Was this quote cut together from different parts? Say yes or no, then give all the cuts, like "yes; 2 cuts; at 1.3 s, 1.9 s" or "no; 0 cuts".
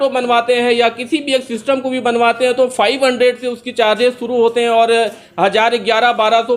no; 0 cuts